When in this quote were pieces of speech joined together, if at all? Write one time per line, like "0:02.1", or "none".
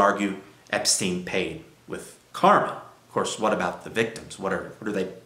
none